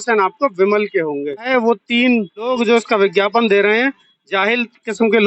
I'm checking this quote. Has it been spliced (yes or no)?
yes